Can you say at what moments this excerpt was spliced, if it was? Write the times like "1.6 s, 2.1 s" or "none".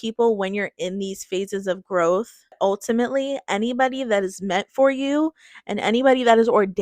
2.6 s

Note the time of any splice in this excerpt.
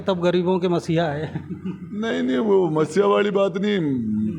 none

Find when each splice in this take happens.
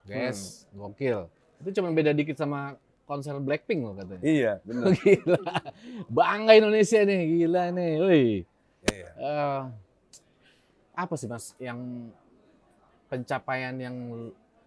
none

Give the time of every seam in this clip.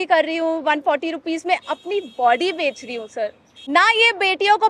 3.5 s

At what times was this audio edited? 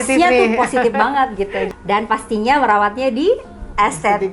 1.7 s

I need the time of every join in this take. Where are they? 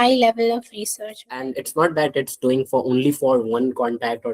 1.2 s

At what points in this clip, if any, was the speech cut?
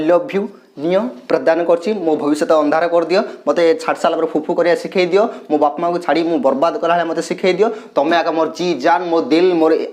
none

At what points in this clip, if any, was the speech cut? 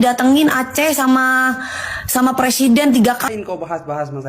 3.0 s

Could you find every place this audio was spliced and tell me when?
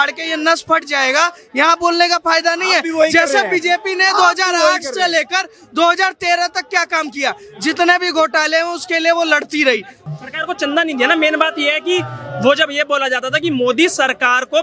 10.0 s

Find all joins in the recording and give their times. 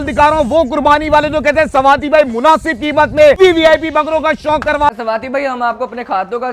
3.4 s, 4.9 s

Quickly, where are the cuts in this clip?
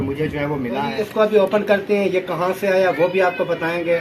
0.9 s

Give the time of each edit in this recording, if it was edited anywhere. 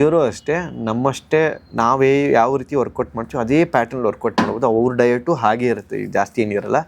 none

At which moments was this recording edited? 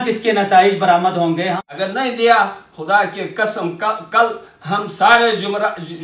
1.6 s

